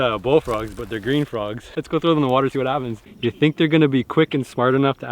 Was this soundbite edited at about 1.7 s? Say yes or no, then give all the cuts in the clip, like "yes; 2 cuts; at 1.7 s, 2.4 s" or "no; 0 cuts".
yes; 1 cut; at 1.7 s